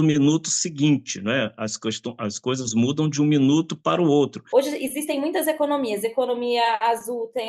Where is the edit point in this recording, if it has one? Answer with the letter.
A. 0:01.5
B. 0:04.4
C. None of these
B